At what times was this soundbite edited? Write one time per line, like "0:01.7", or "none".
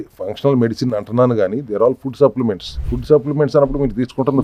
none